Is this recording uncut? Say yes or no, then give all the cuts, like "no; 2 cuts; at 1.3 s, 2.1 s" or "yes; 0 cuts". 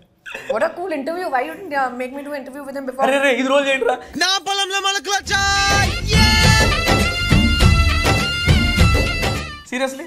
yes; 0 cuts